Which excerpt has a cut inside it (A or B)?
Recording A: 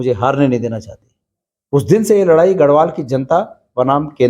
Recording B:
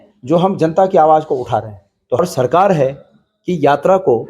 B